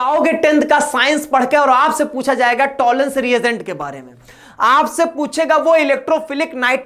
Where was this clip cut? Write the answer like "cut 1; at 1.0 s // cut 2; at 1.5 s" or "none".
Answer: none